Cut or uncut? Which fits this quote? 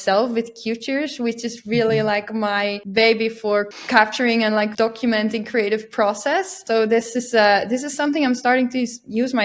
cut